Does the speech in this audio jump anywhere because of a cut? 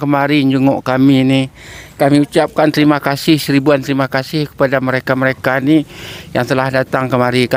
no; 0 cuts

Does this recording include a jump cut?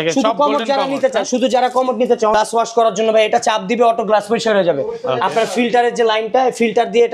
yes; 1 cut; at 2.3 s

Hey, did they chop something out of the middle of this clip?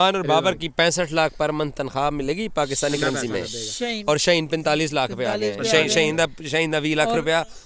no; 0 cuts

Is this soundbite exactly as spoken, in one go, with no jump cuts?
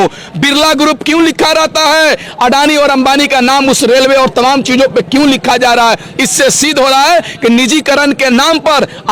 yes; 0 cuts

